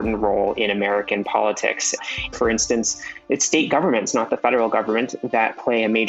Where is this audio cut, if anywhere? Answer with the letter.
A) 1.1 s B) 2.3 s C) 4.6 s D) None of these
B